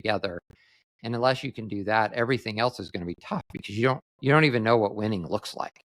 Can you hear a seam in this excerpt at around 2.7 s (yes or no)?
no